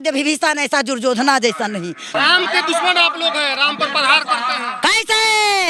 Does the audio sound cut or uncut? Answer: cut